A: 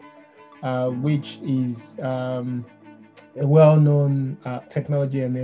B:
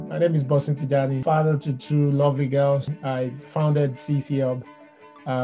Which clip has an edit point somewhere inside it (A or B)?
B